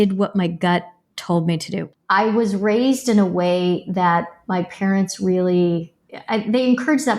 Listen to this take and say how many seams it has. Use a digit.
1